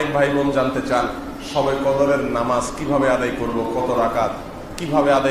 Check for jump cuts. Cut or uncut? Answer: uncut